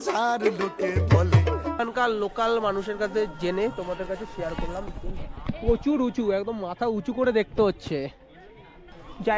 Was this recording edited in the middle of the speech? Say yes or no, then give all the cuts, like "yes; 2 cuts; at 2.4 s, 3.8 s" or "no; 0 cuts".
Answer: yes; 1 cut; at 1.8 s